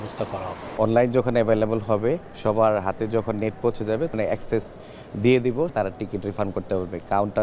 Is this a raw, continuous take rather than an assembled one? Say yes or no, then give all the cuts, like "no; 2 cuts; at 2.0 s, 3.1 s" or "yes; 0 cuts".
no; 4 cuts; at 0.7 s, 2.3 s, 4.1 s, 5.7 s